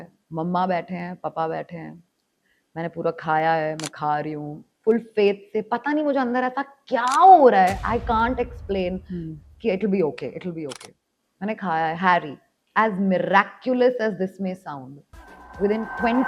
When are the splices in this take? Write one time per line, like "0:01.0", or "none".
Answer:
none